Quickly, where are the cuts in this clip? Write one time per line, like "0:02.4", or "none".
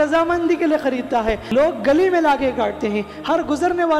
0:01.4

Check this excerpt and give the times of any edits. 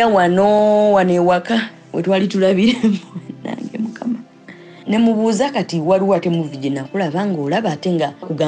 0:04.8

